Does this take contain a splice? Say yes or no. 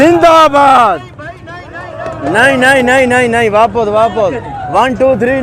no